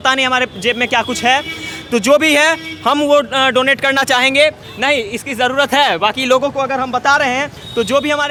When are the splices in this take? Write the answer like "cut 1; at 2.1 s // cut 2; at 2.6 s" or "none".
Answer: none

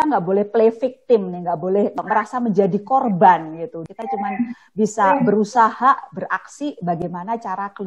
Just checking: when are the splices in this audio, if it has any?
cut 1; at 2.0 s // cut 2; at 3.9 s

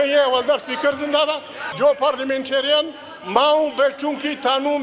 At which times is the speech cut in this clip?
cut 1; at 1.7 s

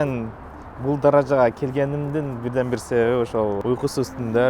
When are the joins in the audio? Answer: cut 1; at 3.6 s

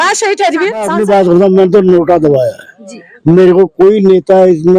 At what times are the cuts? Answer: cut 1; at 0.9 s

